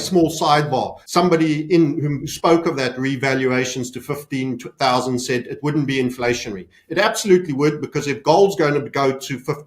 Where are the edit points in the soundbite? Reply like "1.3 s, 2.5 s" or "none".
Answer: 1.0 s